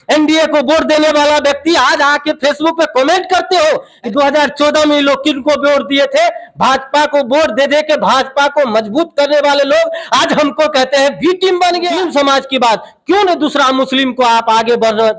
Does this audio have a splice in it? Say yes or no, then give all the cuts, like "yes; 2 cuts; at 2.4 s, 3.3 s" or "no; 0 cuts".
yes; 2 cuts; at 3.9 s, 11.9 s